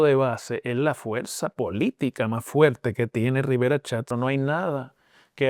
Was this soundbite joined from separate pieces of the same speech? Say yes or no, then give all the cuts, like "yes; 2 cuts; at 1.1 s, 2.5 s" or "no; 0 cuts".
yes; 1 cut; at 4.1 s